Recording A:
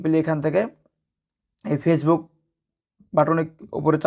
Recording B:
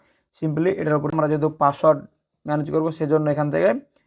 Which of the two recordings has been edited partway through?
B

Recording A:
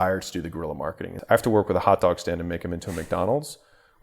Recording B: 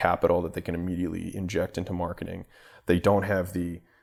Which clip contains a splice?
A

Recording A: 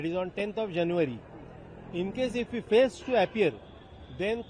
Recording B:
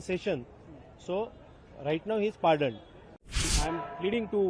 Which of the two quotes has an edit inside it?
B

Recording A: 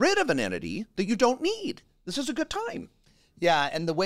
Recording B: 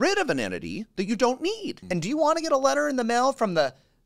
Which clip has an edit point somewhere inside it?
B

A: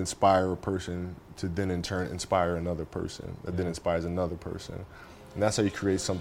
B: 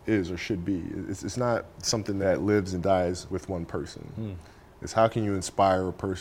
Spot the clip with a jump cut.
B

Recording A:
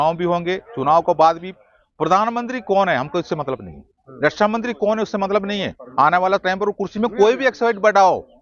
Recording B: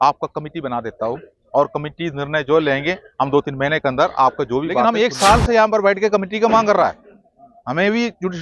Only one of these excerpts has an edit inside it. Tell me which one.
B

